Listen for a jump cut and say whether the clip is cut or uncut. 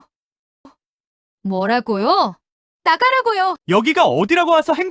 cut